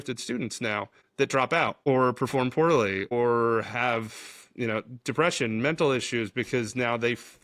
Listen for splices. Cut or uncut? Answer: cut